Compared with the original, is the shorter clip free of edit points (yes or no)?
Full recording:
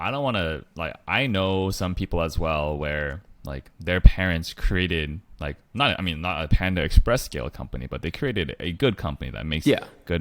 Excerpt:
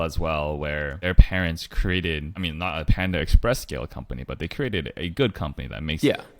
no